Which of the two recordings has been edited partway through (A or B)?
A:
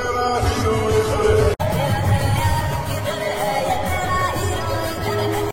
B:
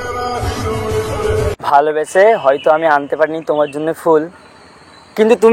B